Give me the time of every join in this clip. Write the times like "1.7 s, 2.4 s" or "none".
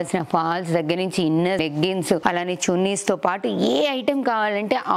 1.6 s